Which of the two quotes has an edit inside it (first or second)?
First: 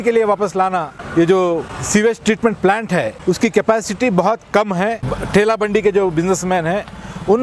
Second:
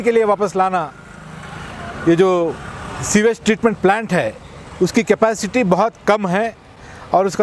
first